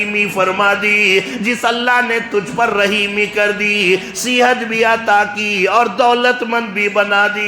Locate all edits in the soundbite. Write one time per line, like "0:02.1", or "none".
none

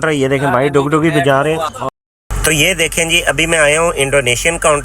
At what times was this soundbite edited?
0:01.9

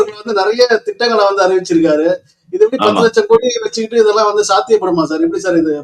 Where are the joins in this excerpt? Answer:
none

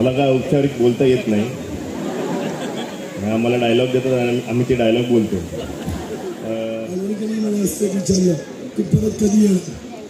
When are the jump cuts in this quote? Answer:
0:06.9

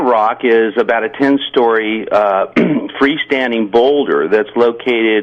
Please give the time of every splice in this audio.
0:01.2

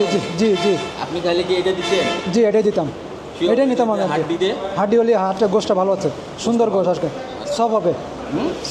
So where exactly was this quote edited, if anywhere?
none

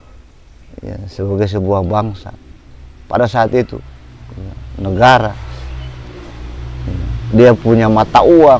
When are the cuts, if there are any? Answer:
none

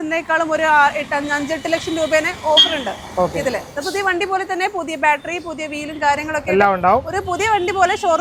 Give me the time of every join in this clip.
none

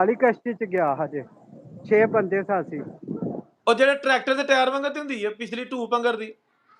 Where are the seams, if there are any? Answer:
none

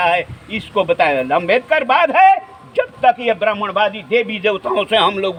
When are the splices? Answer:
none

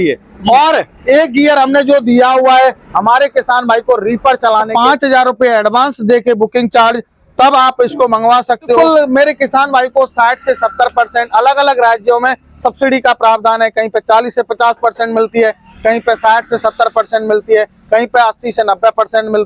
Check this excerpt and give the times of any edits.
0:04.7
0:08.8

